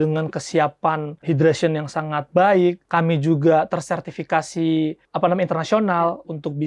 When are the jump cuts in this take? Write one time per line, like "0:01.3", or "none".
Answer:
0:01.1
0:02.8
0:05.0